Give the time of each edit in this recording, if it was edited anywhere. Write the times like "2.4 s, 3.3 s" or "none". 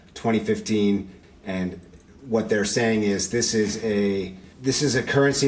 1.1 s